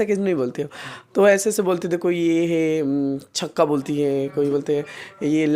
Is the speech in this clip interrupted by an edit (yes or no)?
no